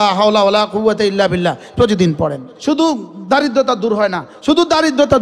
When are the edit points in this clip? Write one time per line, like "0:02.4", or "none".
0:02.5